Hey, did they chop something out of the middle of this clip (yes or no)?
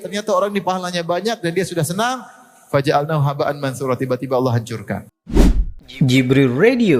yes